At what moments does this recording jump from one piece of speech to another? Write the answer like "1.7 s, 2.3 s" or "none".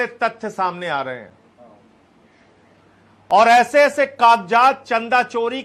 none